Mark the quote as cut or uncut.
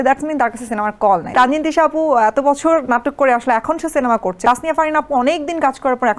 cut